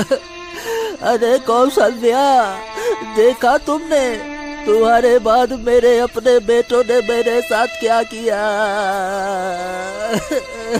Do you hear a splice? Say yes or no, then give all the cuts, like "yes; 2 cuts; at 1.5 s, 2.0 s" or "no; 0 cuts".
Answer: no; 0 cuts